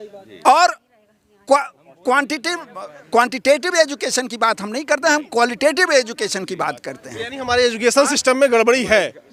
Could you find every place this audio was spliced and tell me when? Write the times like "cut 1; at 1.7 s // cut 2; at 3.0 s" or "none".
none